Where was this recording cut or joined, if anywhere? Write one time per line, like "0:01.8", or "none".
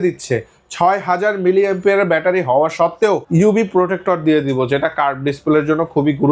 0:03.2